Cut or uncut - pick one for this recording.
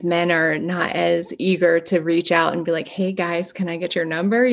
uncut